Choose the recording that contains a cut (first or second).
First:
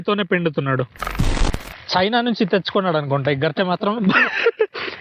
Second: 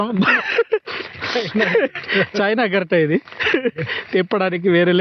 first